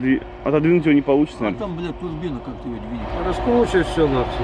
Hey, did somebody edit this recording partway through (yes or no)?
yes